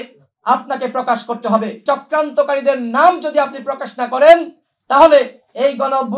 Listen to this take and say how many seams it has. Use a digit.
1